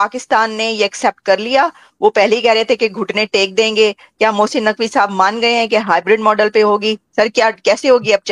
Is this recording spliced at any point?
no; 0 cuts

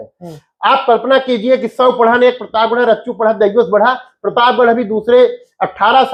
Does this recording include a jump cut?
no; 0 cuts

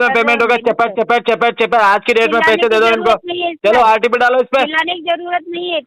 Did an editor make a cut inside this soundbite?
no; 0 cuts

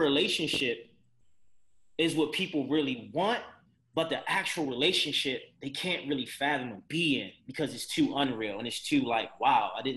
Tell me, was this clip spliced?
no; 0 cuts

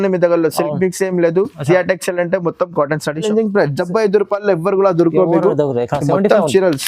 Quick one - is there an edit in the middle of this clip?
yes; 1 cut; at 3.2 s

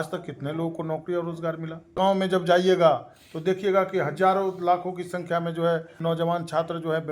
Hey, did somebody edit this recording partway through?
yes; 2 cuts; at 1.9 s, 5.9 s

